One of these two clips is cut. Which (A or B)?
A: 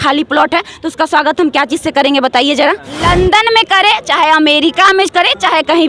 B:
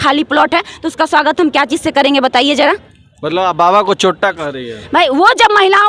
A